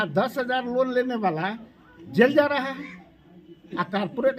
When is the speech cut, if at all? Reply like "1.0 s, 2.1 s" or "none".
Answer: none